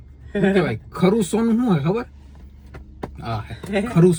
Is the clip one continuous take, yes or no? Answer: yes